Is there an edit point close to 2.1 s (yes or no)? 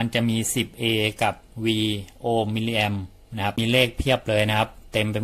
no